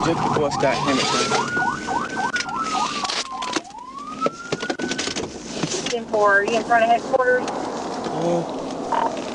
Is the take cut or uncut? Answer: uncut